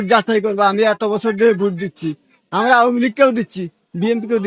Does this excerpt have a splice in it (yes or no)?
no